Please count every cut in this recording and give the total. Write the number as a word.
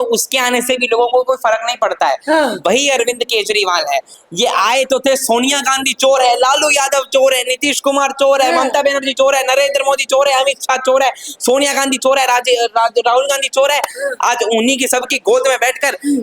one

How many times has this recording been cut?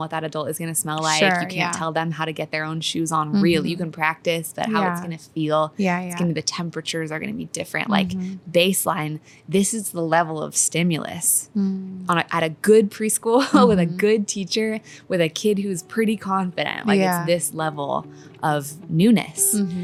zero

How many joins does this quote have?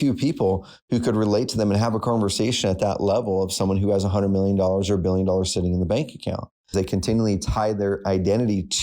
one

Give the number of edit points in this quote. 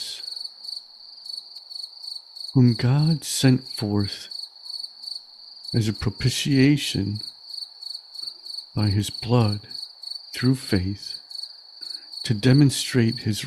two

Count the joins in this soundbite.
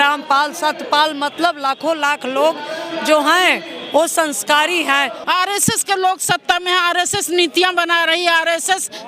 one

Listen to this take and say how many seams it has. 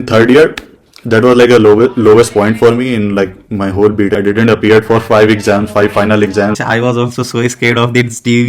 two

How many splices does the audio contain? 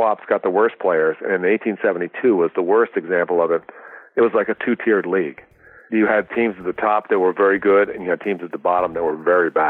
one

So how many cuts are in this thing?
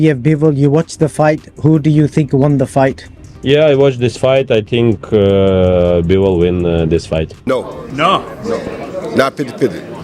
one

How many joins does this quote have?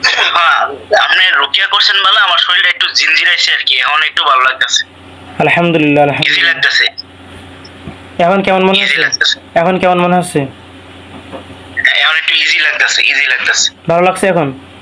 zero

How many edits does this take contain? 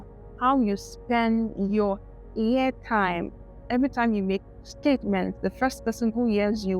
one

